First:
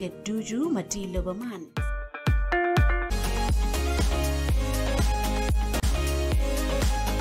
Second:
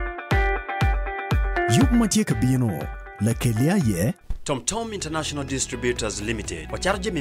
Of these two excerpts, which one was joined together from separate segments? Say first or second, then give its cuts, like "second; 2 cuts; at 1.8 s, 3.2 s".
first; 2 cuts; at 3.1 s, 5.8 s